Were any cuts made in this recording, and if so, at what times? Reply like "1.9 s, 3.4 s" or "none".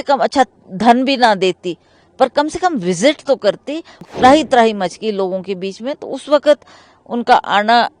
4.1 s